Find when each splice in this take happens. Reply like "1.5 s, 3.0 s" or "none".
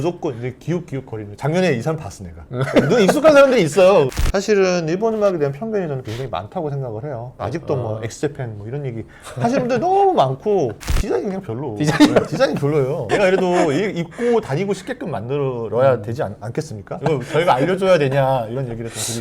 1.3 s, 4.1 s, 7.4 s, 10.8 s, 17.0 s